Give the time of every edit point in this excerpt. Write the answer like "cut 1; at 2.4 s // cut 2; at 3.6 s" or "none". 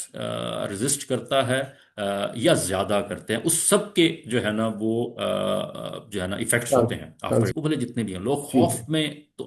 cut 1; at 7.5 s